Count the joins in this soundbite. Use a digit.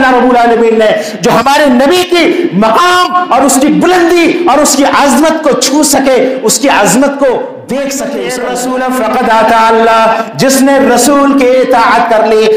1